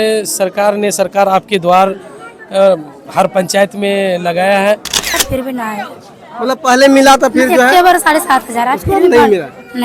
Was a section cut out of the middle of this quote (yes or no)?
yes